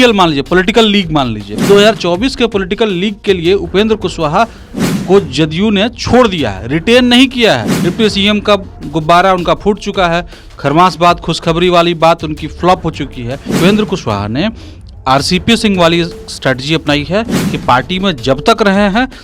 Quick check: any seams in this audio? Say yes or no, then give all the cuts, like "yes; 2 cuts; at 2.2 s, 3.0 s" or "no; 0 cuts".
yes; 3 cuts; at 1.5 s, 7.8 s, 13.5 s